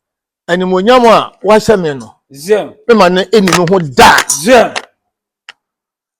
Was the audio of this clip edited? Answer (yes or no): no